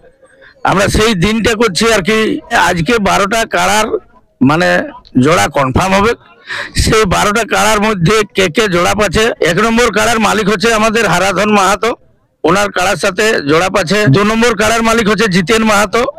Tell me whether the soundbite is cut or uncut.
cut